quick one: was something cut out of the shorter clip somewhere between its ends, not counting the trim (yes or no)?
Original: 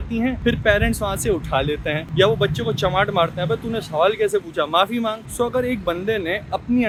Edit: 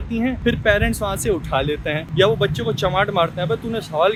no